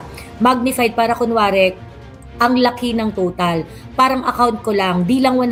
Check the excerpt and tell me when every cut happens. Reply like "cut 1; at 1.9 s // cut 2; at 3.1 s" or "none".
none